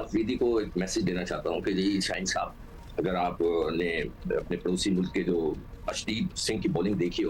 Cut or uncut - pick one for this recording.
uncut